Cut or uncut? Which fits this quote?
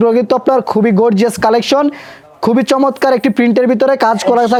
uncut